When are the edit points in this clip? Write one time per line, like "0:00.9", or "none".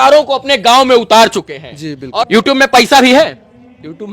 0:02.1